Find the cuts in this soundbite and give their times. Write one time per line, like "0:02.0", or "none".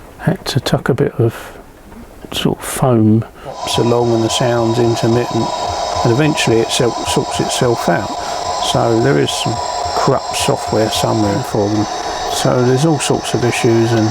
0:03.6
0:11.4